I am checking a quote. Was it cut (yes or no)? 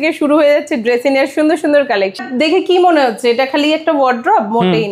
yes